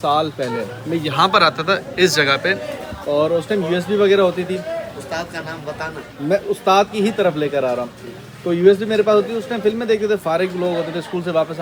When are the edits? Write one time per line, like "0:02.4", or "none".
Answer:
none